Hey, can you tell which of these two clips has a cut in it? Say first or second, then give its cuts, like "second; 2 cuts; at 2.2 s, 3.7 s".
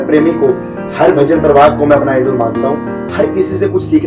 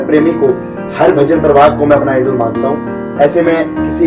first; 1 cut; at 3.1 s